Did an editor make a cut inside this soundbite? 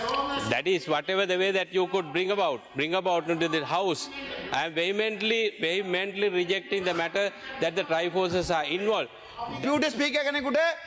yes; 1 cut; at 9.6 s

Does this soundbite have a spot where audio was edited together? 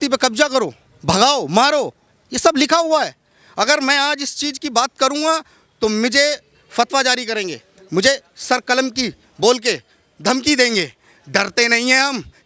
no; 0 cuts

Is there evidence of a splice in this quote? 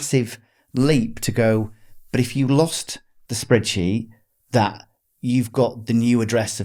no; 0 cuts

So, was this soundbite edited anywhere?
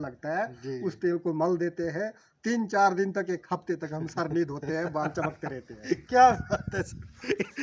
no; 0 cuts

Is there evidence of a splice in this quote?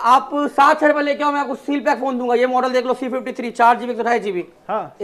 no; 0 cuts

